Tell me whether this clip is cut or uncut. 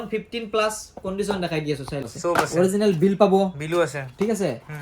cut